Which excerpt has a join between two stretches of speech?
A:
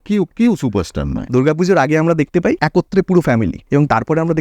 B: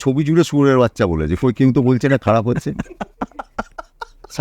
A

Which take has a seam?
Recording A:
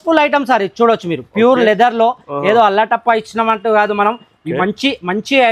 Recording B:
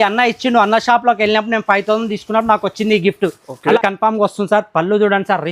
B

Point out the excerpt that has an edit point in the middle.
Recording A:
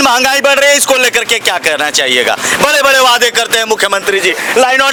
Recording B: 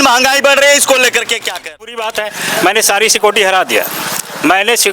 B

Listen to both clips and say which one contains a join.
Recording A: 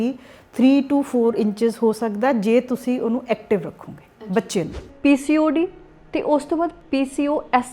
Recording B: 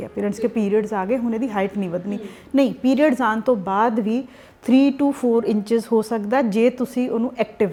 A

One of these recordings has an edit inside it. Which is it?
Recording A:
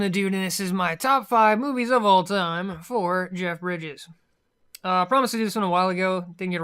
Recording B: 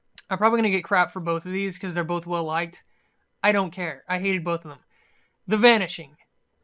B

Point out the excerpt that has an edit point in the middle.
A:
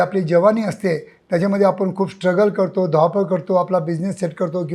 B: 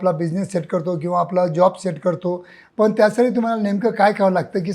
B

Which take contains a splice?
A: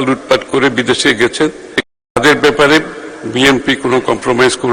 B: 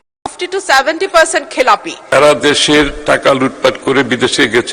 B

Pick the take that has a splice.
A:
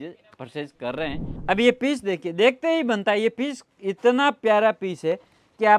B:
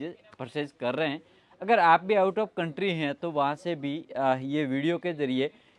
A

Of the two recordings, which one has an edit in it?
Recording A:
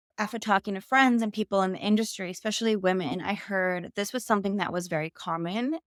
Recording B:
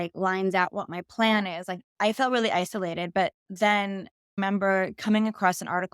B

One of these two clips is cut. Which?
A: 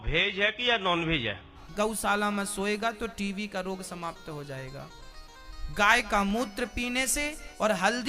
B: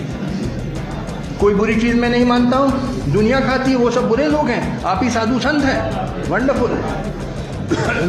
A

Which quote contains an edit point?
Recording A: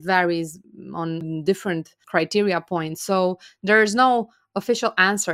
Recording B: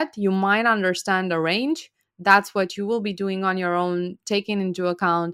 A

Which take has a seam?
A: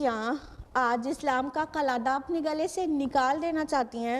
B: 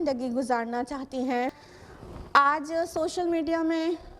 B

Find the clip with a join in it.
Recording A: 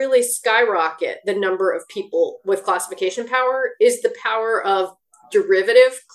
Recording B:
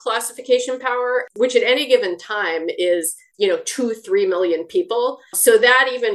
B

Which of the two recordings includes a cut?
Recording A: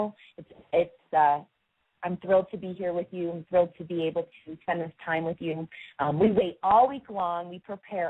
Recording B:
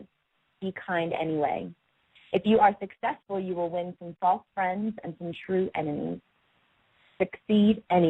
A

